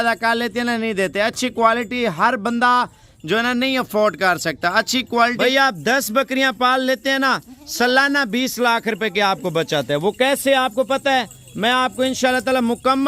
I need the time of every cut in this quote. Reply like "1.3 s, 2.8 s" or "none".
5.4 s